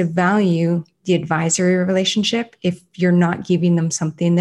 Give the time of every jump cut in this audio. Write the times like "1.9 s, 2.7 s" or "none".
none